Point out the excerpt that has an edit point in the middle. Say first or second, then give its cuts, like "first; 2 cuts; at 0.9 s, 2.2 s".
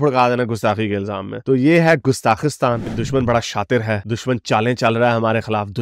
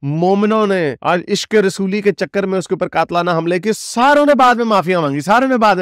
first; 1 cut; at 2.9 s